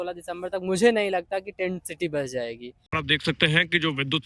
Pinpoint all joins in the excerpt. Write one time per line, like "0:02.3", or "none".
0:02.7